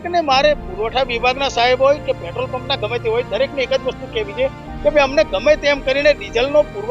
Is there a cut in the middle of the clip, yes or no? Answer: no